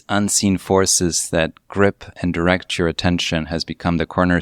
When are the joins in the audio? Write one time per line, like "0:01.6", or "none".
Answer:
none